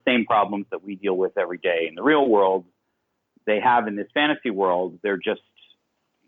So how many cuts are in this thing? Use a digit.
0